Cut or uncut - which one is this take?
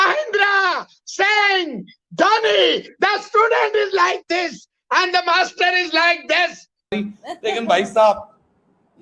cut